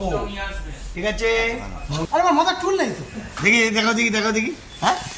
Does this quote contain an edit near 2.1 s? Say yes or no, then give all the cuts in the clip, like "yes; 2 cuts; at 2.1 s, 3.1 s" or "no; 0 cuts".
yes; 1 cut; at 2.1 s